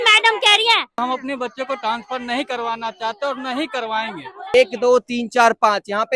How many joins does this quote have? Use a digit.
2